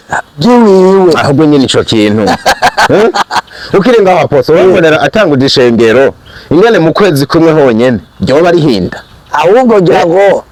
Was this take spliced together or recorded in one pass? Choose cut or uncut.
uncut